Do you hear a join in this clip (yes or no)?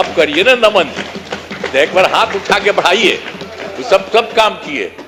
no